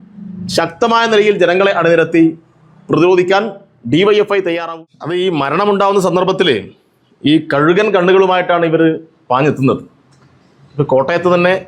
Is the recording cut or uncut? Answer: cut